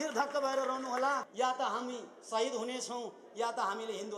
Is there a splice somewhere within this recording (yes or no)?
yes